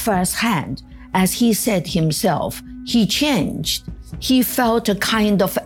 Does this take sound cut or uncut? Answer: uncut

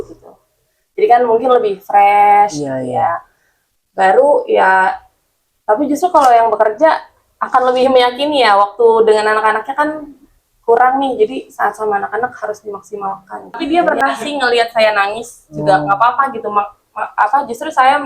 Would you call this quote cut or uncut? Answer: cut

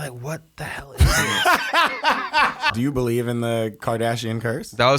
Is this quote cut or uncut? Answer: cut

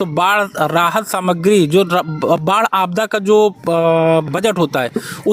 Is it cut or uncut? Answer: uncut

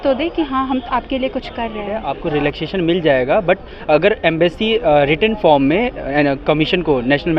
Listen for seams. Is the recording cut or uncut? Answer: cut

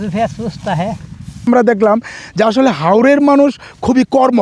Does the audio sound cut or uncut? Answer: cut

